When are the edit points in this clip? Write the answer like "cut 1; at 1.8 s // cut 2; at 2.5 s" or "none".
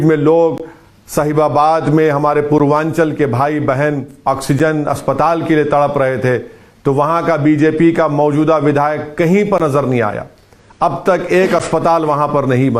none